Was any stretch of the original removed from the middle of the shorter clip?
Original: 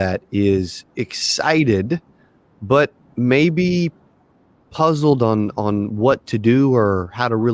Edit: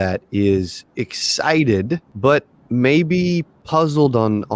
yes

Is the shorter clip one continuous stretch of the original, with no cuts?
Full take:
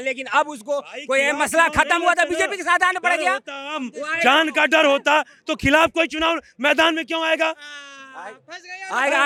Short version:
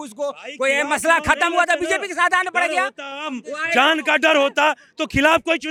yes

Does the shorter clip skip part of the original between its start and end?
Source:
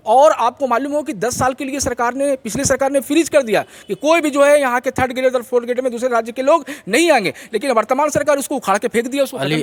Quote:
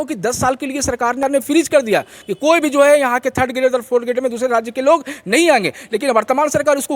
yes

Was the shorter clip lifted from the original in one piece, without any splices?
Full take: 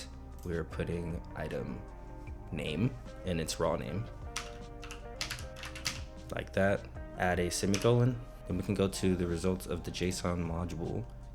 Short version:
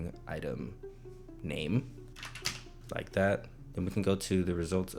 no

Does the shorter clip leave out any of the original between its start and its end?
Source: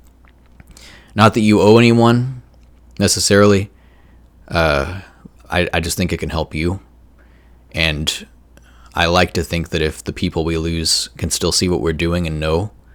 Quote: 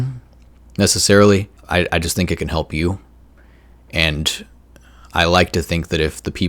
yes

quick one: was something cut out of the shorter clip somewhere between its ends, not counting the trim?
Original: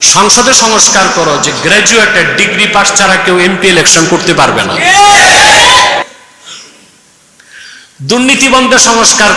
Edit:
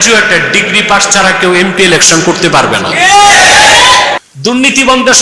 yes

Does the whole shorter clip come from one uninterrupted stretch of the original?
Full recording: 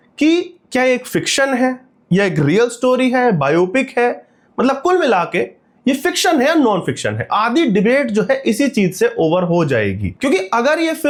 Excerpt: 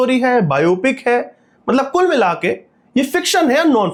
yes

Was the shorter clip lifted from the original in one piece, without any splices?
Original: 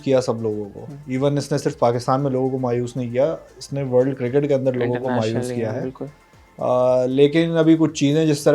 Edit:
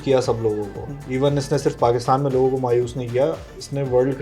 yes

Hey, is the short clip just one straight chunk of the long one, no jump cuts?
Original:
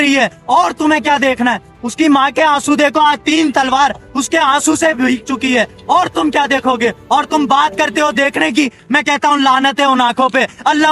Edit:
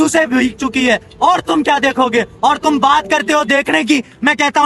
yes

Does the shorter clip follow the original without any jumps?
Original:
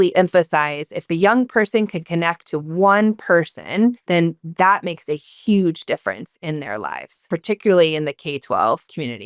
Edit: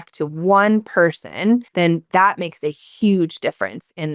no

